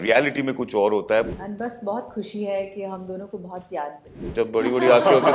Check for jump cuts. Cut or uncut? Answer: cut